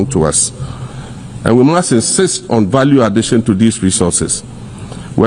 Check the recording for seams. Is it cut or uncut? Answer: uncut